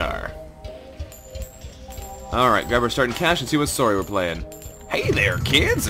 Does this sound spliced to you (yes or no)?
yes